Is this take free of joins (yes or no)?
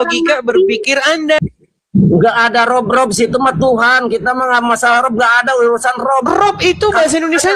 no